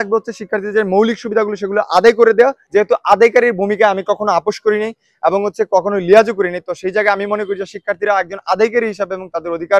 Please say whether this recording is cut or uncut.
cut